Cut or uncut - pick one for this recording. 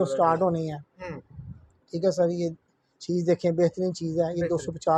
uncut